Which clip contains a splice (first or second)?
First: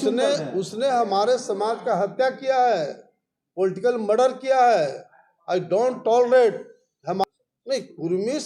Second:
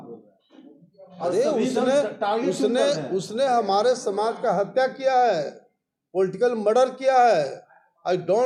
first